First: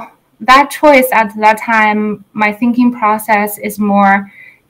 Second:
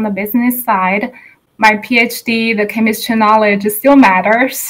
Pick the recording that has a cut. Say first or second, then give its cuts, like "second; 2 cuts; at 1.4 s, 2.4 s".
second; 1 cut; at 1.3 s